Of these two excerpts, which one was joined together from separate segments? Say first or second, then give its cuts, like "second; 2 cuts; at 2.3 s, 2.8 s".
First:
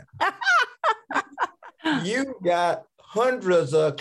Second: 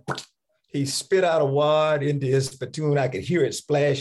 first; 1 cut; at 1.7 s